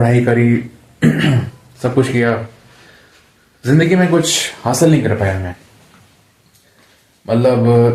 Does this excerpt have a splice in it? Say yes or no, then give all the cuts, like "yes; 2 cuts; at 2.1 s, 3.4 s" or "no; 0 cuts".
no; 0 cuts